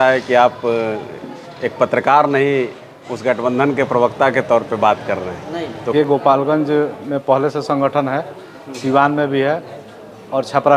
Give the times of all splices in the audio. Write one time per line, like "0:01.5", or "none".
0:05.9